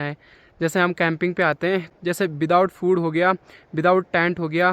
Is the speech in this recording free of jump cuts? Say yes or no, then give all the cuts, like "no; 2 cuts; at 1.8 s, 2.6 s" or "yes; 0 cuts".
no; 1 cut; at 2.0 s